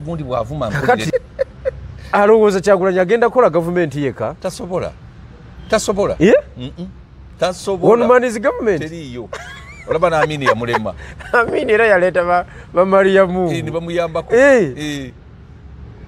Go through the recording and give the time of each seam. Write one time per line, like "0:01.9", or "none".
0:01.0